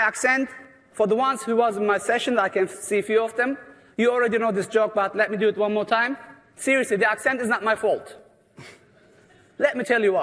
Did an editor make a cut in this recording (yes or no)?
no